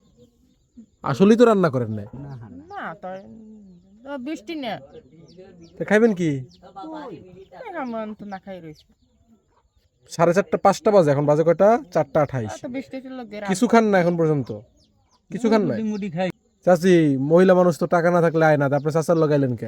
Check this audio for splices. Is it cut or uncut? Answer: cut